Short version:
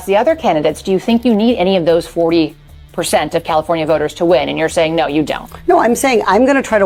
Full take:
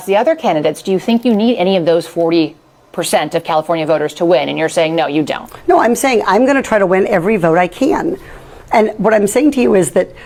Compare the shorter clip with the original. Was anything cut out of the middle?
no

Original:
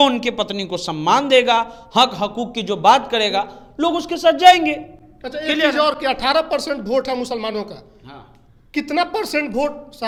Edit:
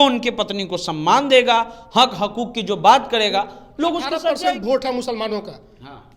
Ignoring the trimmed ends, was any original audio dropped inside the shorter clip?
yes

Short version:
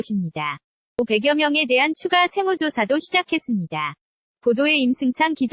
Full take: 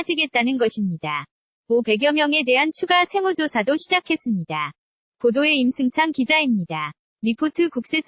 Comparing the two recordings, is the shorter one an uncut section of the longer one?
no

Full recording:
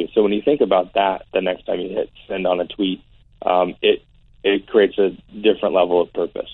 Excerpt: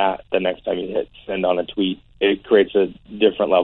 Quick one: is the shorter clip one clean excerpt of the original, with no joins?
no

